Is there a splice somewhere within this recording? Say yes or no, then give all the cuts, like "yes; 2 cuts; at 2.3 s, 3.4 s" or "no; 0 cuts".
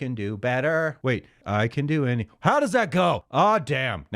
yes; 2 cuts; at 1.1 s, 3.2 s